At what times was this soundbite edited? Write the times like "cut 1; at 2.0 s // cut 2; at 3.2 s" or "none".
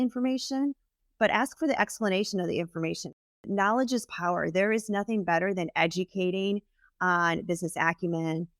cut 1; at 3.3 s